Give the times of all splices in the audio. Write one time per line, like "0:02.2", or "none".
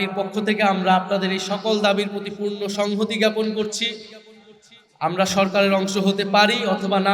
none